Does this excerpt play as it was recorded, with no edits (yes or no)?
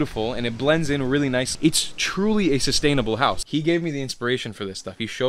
no